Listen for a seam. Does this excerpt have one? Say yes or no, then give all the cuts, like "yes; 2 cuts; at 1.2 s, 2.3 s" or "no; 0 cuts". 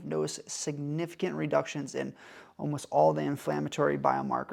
no; 0 cuts